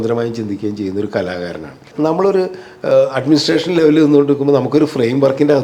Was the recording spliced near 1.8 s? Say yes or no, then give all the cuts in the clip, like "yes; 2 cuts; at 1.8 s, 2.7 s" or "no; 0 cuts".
yes; 1 cut; at 1.8 s